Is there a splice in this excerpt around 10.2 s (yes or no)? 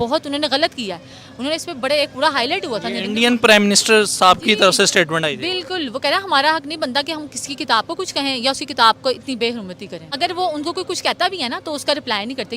yes